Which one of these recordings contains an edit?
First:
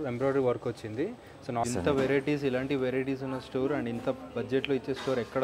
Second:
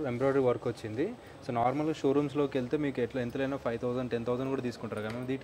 first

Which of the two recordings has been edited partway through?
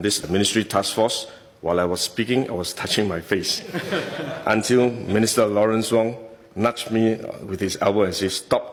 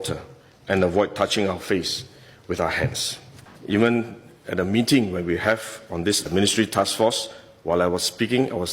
second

